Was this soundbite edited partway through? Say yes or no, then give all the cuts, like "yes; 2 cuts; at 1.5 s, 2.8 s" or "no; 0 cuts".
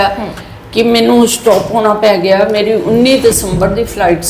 no; 0 cuts